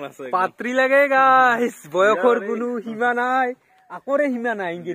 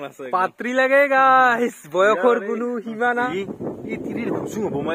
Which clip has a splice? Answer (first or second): second